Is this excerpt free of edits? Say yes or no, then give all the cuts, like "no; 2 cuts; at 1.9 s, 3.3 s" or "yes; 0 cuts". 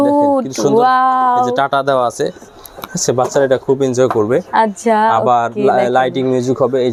yes; 0 cuts